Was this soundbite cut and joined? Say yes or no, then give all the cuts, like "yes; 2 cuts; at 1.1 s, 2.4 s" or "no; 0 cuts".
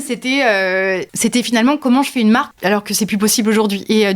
yes; 2 cuts; at 1.1 s, 2.5 s